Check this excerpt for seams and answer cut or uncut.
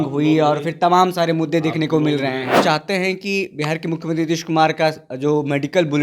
cut